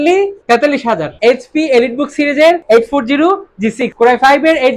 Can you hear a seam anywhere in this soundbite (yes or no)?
yes